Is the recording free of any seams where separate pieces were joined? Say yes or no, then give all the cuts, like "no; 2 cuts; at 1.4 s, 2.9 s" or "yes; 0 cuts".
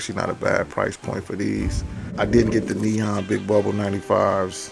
no; 1 cut; at 2.1 s